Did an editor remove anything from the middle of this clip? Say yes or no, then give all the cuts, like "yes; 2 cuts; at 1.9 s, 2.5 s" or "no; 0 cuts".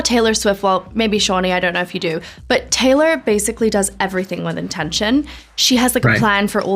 no; 0 cuts